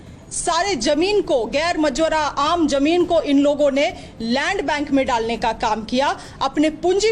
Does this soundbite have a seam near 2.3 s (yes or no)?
no